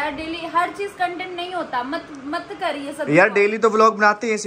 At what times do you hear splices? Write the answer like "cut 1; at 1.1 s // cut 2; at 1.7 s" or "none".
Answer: none